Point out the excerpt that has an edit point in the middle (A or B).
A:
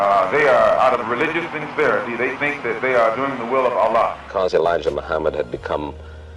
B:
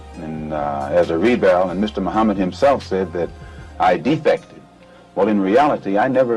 A